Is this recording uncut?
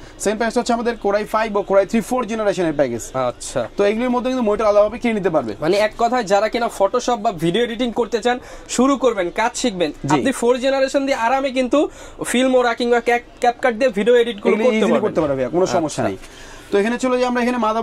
yes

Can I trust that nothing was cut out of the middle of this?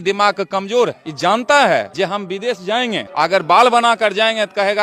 no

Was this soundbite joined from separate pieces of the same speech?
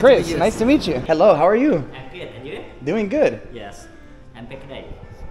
yes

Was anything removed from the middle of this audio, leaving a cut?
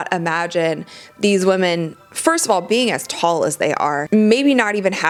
no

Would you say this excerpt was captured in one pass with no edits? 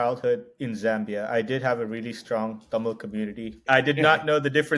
no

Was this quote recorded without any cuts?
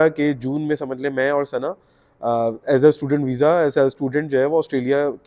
yes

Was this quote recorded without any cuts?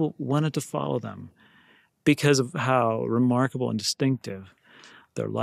yes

